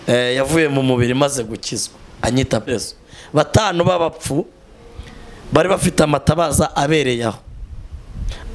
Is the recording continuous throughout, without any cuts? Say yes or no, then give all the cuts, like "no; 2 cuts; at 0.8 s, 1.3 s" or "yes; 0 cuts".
no; 1 cut; at 2.7 s